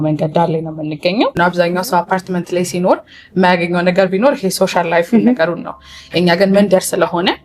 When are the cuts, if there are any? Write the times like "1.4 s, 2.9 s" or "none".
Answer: 1.3 s

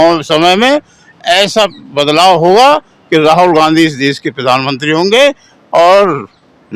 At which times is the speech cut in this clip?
none

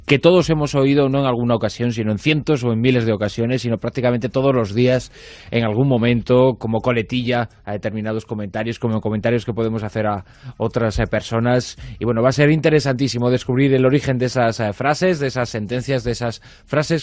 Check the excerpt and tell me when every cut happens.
none

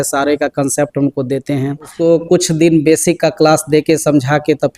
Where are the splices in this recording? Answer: 1.9 s

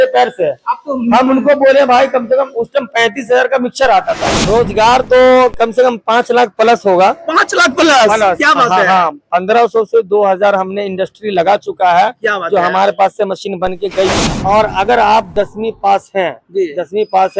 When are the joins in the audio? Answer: 4.3 s, 14.3 s

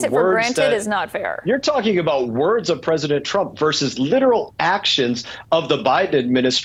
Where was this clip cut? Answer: none

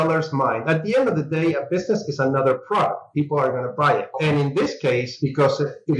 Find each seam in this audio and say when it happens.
4.2 s, 5.1 s

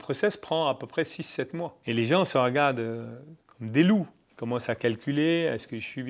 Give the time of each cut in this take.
1.8 s

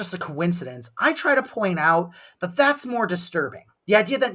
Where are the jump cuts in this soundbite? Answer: none

